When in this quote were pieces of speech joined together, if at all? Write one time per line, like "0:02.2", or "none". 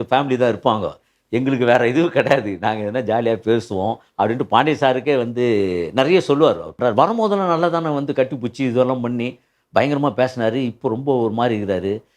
0:06.8